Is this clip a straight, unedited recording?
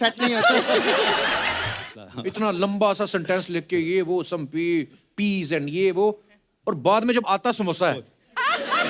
no; 1 cut; at 1.9 s

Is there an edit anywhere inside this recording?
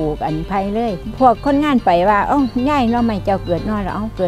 yes; 1 cut; at 1.0 s

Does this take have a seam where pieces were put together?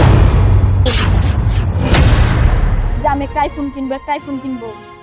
yes; 1 cut; at 2.8 s

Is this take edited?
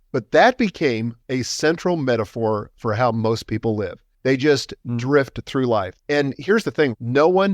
yes; 3 cuts; at 1.1 s, 4.0 s, 5.9 s

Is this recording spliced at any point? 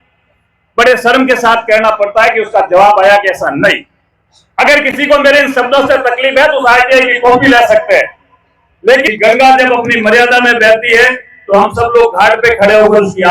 yes; 1 cut; at 9.1 s

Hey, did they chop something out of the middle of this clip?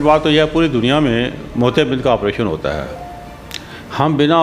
no; 0 cuts

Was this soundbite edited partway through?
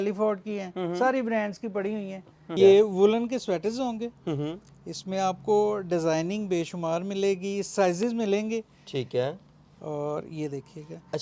yes; 1 cut; at 2.5 s

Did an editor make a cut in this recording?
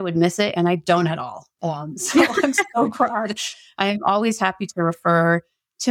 no; 0 cuts

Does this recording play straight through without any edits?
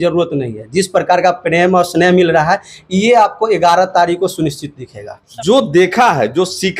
no; 1 cut; at 5.1 s

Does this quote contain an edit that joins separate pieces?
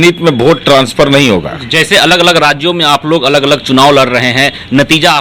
no; 0 cuts

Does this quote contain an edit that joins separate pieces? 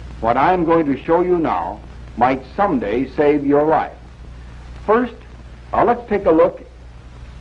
no; 0 cuts

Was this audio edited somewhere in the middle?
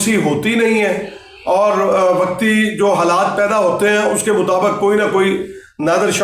no; 0 cuts

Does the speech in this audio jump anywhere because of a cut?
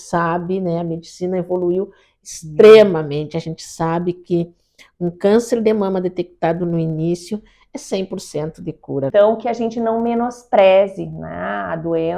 yes; 1 cut; at 9.1 s

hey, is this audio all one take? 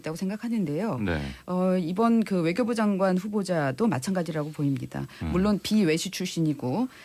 no; 1 cut; at 1.2 s

